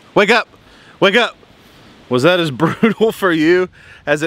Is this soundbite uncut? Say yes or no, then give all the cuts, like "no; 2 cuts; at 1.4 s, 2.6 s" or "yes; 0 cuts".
yes; 0 cuts